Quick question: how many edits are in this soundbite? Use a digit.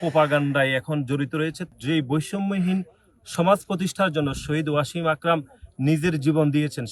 1